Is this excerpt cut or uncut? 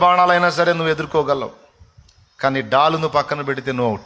uncut